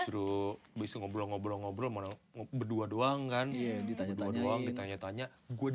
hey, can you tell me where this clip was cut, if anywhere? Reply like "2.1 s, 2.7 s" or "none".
none